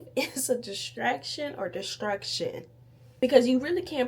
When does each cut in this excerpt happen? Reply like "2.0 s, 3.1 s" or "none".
3.1 s